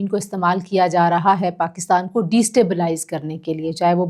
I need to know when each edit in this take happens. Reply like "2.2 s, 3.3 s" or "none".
none